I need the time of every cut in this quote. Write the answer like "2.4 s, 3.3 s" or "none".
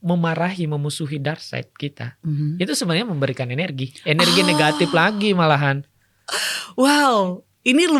none